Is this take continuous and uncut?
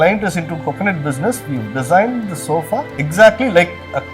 no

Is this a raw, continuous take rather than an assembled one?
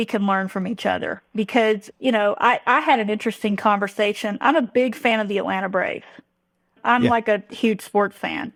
yes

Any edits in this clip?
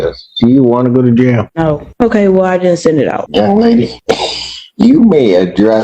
yes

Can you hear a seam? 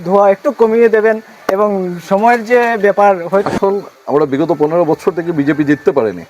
yes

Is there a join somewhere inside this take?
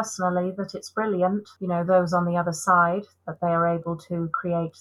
yes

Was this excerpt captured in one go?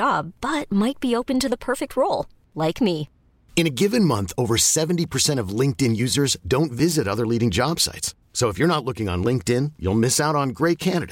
yes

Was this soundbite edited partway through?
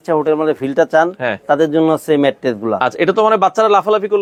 no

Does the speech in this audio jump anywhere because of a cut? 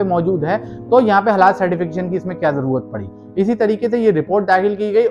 no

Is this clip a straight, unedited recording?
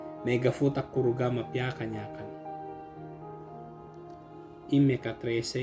no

